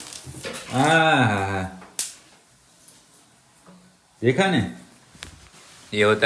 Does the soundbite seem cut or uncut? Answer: uncut